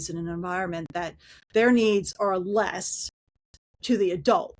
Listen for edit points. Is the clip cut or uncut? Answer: uncut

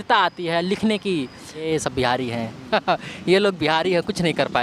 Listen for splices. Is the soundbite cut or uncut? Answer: cut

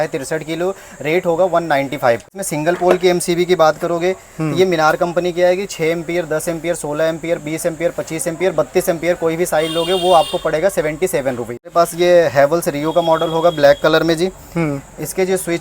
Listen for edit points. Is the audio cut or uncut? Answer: cut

